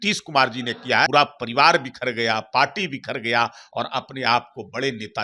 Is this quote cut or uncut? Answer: cut